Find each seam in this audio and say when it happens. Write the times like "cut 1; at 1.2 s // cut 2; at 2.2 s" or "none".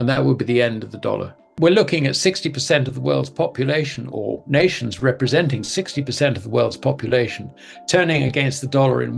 cut 1; at 1.5 s